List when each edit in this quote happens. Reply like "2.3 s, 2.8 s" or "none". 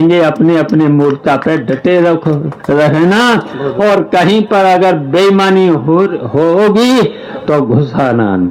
none